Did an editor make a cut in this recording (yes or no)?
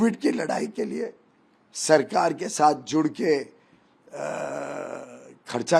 no